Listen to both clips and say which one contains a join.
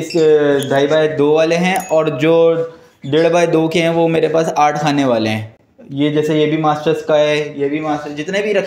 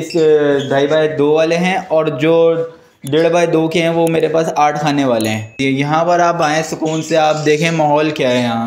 second; 1 cut; at 5.6 s

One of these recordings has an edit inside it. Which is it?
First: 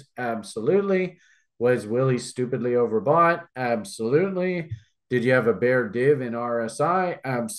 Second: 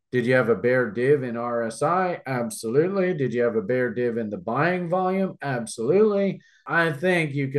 second; 1 cut; at 6.7 s

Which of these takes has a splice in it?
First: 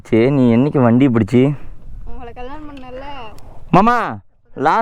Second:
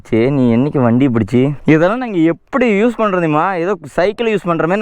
second; 1 cut; at 1.6 s

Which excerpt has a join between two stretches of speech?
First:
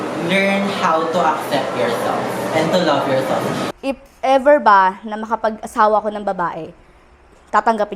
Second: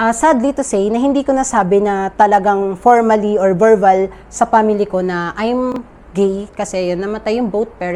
first; 1 cut; at 3.7 s

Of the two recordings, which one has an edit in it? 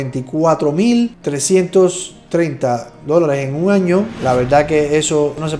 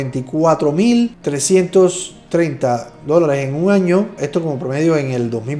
first; 1 cut; at 4.1 s

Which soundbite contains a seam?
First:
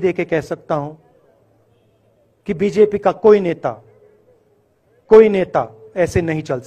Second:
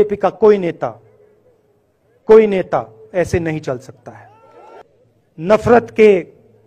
second; 1 cut; at 4.8 s

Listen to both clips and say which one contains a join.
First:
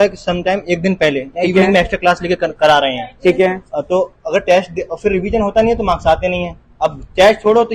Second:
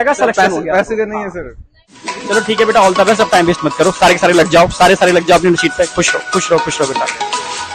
second; 1 cut; at 1.8 s

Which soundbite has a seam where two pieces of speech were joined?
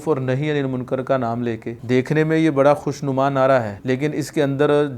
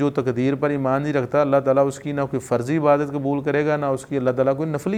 first; 2 cuts; at 1.7 s, 3.7 s

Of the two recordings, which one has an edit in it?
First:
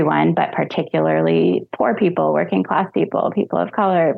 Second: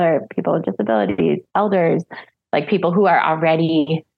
second; 1 cut; at 1.5 s

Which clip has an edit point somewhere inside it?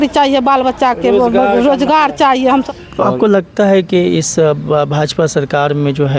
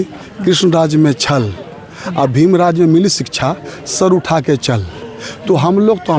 first; 1 cut; at 2.7 s

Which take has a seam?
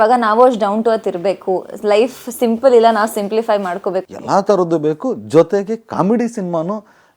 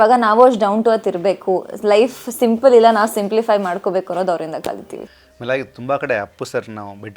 first; 1 cut; at 4.1 s

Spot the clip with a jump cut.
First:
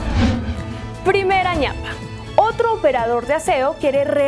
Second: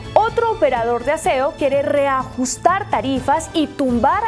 first; 1 cut; at 1.1 s

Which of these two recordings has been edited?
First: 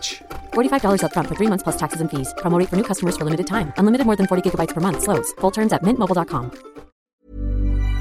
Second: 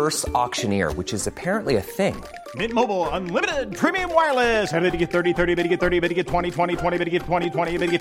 first; 1 cut; at 7.0 s

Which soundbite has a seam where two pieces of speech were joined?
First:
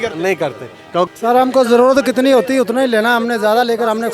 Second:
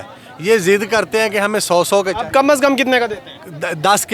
first; 1 cut; at 1.1 s

